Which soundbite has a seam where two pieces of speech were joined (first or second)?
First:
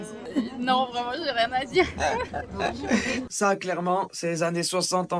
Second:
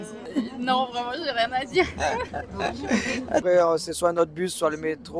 first